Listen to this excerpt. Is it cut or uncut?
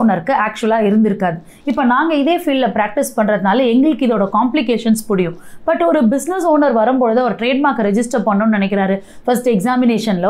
uncut